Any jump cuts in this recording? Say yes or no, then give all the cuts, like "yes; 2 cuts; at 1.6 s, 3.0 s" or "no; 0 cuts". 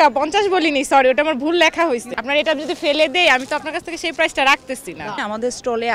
yes; 2 cuts; at 2.1 s, 5.2 s